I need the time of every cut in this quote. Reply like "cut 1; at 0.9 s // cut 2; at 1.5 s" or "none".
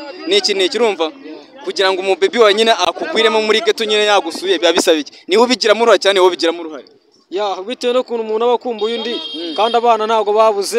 cut 1; at 2.8 s